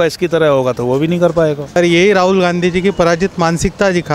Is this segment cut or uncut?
cut